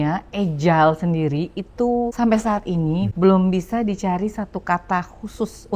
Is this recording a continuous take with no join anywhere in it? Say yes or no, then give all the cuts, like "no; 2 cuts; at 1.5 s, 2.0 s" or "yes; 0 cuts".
no; 2 cuts; at 2.1 s, 3.1 s